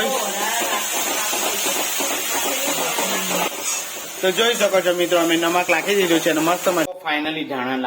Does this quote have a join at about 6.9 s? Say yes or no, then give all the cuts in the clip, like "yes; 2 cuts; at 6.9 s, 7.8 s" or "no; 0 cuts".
yes; 1 cut; at 6.9 s